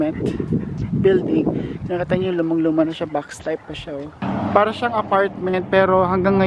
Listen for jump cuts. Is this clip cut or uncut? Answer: cut